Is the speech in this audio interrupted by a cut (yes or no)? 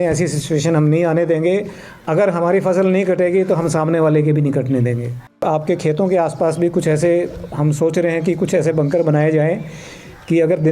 yes